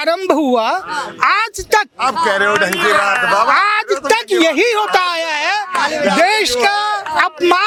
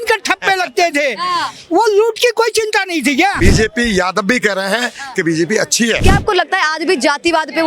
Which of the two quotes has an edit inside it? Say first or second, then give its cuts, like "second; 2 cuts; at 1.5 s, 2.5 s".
second; 2 cuts; at 3.4 s, 6.0 s